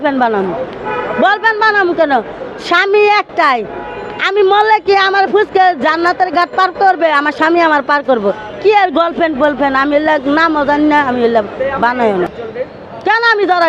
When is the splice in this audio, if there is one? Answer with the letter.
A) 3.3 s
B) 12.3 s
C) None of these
B